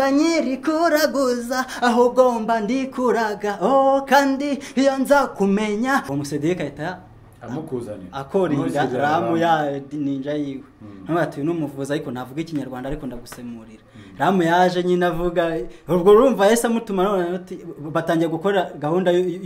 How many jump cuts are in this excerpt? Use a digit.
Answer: 1